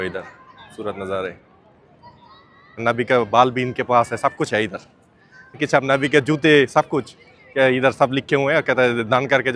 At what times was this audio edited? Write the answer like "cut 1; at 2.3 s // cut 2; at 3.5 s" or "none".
cut 1; at 2.8 s // cut 2; at 5.6 s